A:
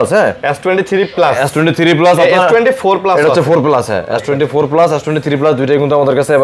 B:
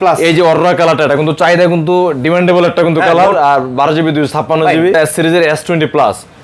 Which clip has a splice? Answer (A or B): B